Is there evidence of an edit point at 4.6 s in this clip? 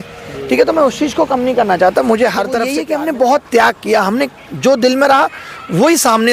no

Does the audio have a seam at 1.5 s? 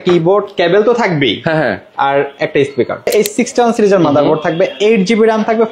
no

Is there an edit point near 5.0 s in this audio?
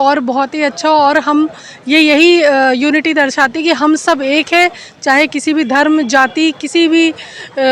no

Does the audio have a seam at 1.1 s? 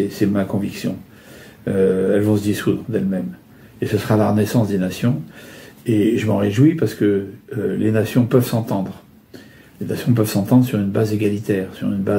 no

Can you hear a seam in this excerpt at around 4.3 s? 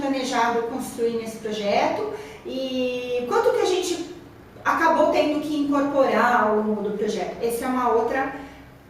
no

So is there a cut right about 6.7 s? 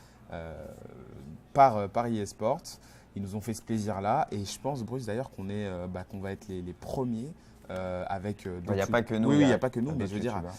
no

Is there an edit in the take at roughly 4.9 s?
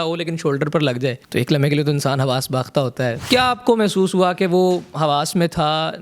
no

